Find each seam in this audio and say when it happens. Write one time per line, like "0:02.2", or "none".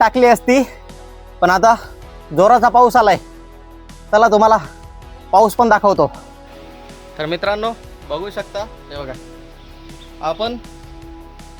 none